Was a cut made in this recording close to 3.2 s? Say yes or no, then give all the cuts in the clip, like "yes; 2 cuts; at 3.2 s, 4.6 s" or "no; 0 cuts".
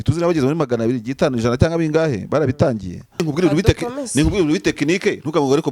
yes; 1 cut; at 3.2 s